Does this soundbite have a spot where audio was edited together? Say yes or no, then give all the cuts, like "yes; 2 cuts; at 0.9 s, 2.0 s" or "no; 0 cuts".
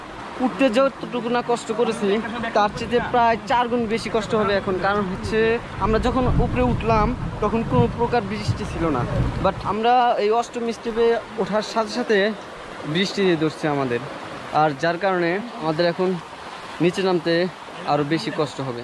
yes; 3 cuts; at 5.7 s, 9.7 s, 15.5 s